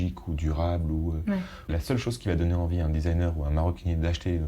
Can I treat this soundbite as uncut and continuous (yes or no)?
no